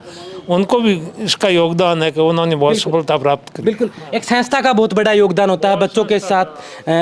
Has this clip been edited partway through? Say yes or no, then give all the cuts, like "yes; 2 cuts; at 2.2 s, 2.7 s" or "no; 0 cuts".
no; 0 cuts